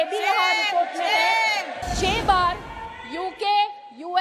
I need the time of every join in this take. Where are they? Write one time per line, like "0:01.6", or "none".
0:01.8